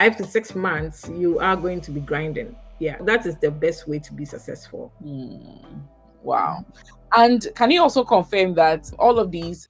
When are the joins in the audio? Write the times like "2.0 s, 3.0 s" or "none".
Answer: 3.0 s, 4.9 s